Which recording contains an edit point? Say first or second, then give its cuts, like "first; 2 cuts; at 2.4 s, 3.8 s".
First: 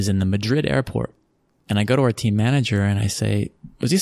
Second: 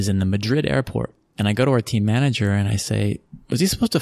second; 1 cut; at 1.2 s